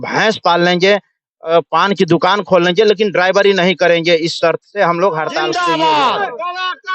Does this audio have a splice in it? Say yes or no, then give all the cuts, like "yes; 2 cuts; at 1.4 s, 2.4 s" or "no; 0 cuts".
yes; 1 cut; at 5.5 s